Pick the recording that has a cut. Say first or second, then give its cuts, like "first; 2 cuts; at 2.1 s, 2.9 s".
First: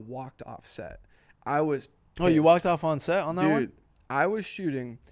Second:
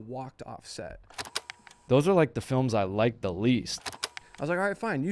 second; 2 cuts; at 1.5 s, 4.0 s